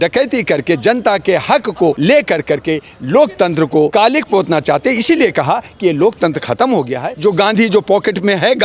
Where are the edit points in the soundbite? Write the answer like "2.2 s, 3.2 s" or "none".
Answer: 2.0 s, 3.9 s, 7.1 s